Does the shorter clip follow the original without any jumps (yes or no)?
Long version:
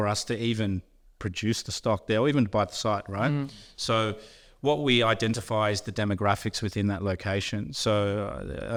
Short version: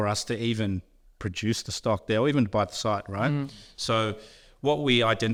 yes